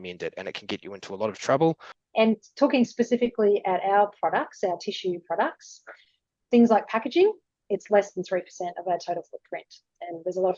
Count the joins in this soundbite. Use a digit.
1